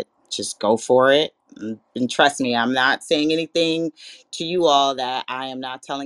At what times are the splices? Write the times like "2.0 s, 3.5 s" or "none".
none